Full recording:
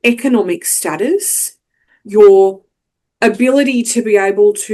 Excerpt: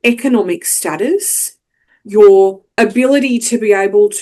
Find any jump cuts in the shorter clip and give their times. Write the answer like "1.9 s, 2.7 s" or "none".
2.6 s